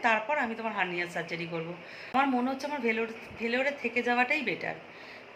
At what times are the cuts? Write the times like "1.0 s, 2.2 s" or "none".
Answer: 2.1 s

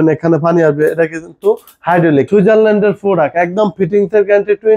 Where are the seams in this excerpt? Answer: 2.3 s

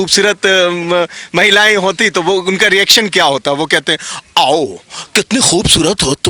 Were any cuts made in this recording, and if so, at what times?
none

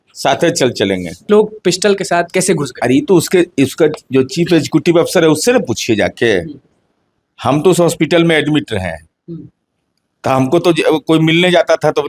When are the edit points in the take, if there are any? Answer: 1.2 s

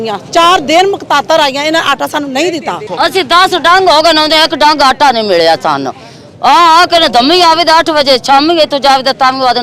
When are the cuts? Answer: 2.8 s

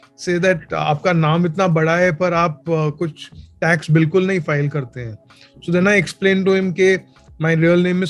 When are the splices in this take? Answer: none

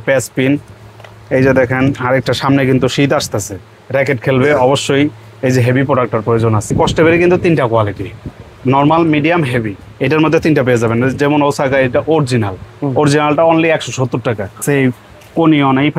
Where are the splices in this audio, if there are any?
6.7 s, 14.6 s

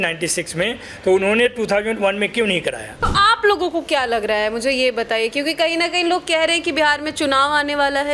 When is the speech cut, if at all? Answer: 3.1 s

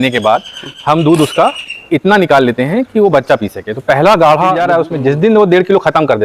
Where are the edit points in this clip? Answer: 4.6 s

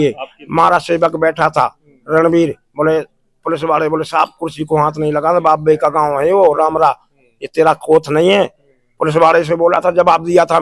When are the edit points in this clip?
none

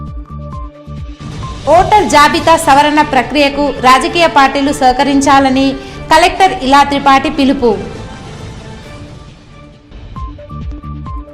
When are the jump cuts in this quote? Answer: 1.0 s

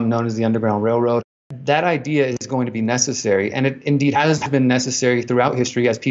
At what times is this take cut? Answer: 1.4 s

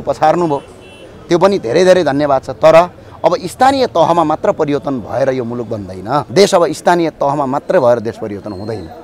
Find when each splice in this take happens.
6.3 s

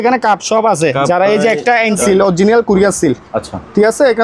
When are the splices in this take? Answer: 2.0 s

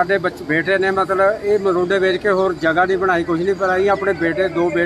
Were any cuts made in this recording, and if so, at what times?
none

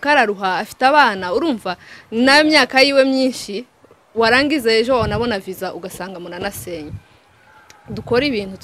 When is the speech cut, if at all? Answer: none

